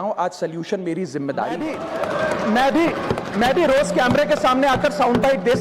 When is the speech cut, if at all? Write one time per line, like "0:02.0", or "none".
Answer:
0:01.7